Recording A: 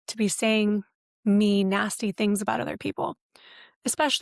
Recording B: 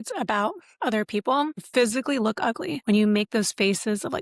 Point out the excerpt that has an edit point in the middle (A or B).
B